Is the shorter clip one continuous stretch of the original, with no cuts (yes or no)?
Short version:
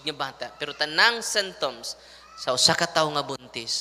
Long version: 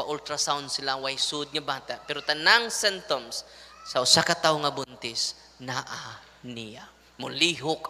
yes